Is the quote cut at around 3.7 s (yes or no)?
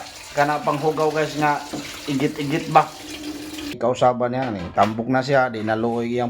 yes